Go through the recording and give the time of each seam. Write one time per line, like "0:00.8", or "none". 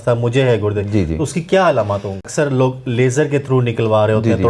0:02.3